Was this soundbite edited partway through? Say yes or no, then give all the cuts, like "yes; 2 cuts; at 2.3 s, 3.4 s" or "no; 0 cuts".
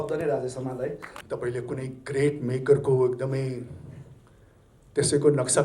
yes; 1 cut; at 1.1 s